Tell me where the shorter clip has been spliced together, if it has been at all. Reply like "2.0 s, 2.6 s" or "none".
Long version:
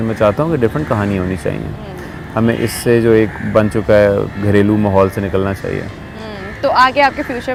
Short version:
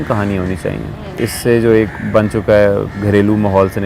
1.2 s

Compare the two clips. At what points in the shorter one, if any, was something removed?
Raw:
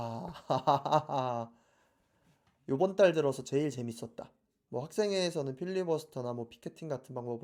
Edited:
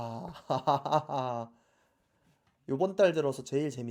none

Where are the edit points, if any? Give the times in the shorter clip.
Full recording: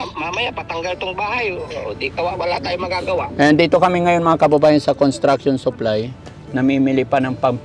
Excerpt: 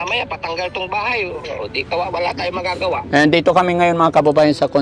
none

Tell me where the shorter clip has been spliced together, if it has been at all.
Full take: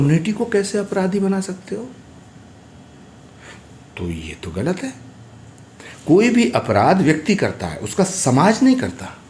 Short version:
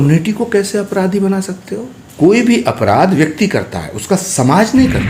2.0 s

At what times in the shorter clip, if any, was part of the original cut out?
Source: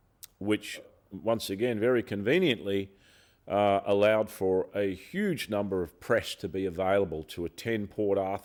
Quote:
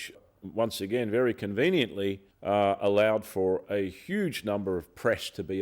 2.3 s

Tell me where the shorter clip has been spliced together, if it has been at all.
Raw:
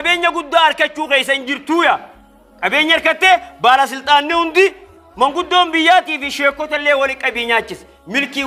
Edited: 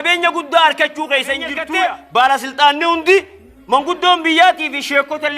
1.6 s

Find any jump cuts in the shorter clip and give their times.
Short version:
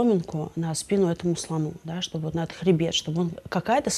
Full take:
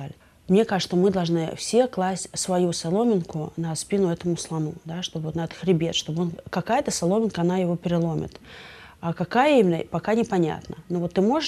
none

